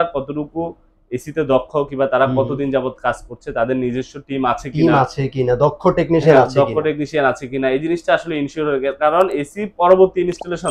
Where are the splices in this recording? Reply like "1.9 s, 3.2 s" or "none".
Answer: none